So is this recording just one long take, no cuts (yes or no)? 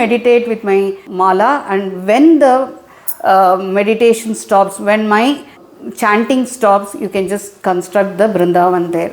no